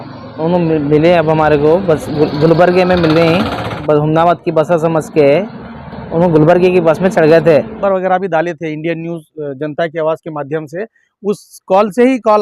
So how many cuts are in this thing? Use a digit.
2